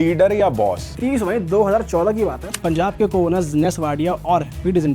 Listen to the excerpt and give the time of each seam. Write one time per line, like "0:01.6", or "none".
0:00.9
0:02.6